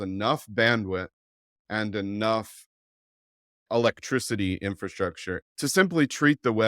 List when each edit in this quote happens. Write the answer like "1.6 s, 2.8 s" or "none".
5.5 s